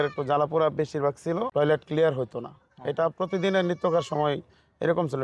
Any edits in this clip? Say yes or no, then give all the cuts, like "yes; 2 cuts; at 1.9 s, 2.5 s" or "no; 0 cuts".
yes; 1 cut; at 1.5 s